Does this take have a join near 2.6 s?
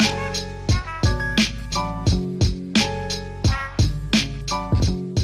yes; 1 cut; at 2.6 s

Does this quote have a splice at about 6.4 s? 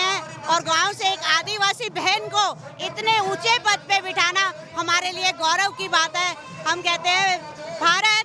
no; 0 cuts

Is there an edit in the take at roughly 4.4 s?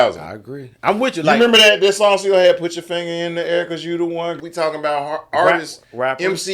yes; 1 cut; at 4.4 s

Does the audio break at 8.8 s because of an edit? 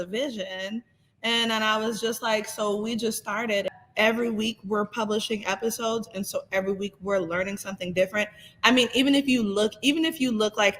no; 1 cut; at 3.6 s

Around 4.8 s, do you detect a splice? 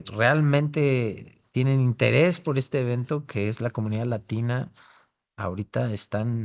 no; 0 cuts

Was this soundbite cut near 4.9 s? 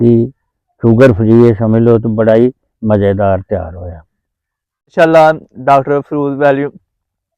yes; 1 cut; at 4.9 s

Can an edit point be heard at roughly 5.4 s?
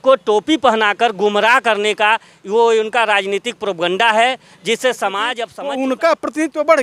yes; 1 cut; at 5.4 s

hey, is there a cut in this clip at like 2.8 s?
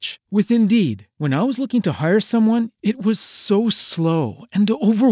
no; 0 cuts

